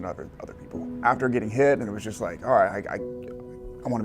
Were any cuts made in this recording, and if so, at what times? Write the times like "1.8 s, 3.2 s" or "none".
0.9 s, 2.0 s